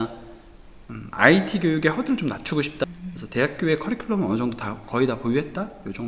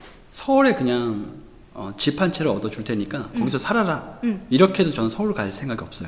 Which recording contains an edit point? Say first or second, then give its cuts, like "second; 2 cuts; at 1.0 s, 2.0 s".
first; 1 cut; at 2.8 s